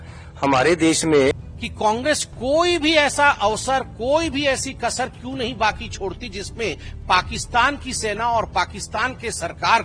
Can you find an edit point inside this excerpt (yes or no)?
yes